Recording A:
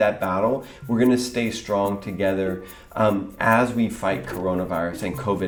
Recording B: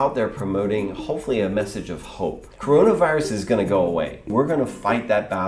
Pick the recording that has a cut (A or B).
B